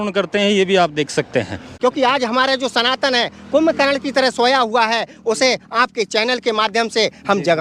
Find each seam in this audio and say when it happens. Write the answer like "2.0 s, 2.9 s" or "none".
1.6 s